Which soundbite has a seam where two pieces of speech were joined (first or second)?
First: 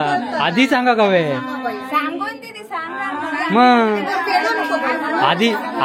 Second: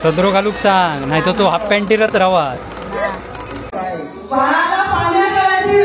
second